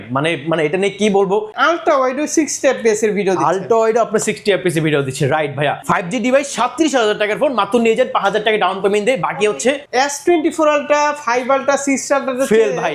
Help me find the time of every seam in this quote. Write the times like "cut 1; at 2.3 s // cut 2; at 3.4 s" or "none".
cut 1; at 1.6 s // cut 2; at 5.8 s // cut 3; at 9.8 s